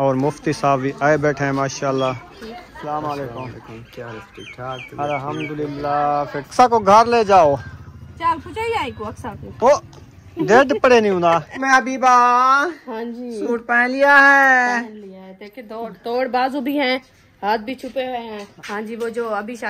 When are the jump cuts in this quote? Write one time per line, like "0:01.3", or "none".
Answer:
0:02.3
0:06.5
0:11.6
0:18.5